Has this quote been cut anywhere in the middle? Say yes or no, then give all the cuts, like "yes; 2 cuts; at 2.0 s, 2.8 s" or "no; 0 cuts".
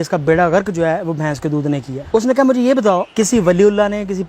yes; 2 cuts; at 1.9 s, 3.1 s